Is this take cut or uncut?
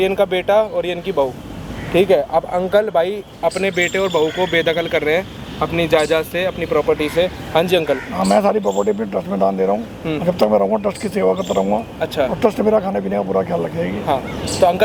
uncut